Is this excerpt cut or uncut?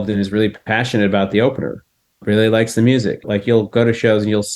cut